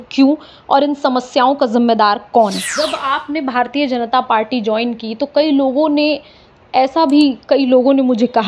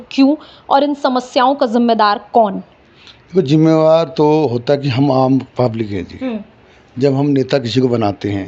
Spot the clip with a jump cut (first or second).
first